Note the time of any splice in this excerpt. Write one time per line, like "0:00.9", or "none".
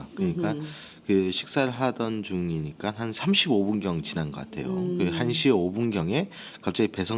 0:02.0